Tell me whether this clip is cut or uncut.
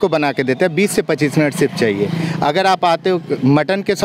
uncut